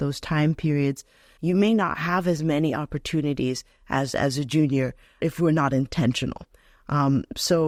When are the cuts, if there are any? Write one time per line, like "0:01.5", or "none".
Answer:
none